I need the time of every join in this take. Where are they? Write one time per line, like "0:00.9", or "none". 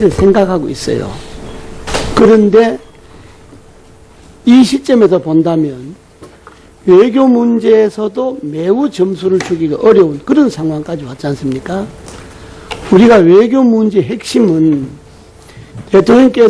0:12.1